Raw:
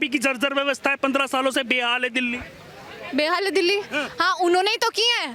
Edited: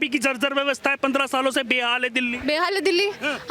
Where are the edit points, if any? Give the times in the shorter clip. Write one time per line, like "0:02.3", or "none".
0:02.4